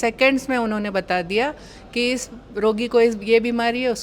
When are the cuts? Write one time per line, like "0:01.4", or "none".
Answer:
none

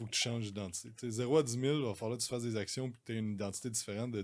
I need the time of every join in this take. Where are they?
none

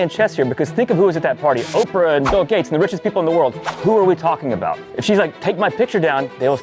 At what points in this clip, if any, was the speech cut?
none

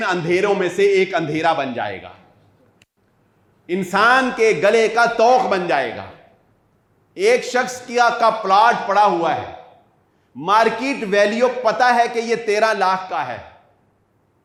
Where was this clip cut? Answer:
none

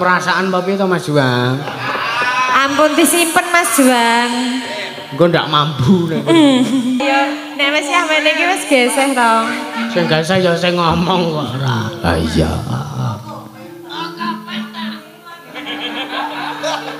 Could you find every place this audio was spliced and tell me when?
0:07.0

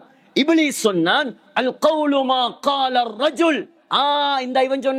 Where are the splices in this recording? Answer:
none

